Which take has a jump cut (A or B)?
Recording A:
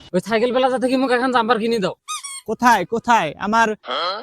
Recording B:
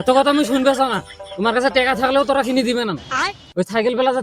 A